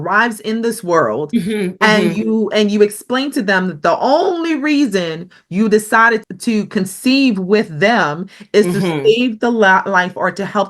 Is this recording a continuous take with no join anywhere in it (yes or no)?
no